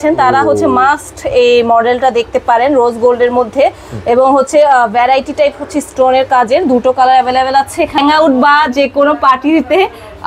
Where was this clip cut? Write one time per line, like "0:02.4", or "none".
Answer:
0:08.0